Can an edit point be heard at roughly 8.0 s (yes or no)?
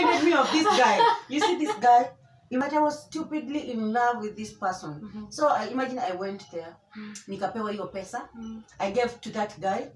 no